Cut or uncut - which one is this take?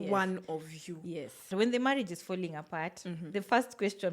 cut